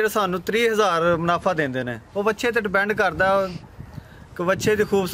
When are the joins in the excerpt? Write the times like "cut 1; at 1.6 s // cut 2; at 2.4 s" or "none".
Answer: none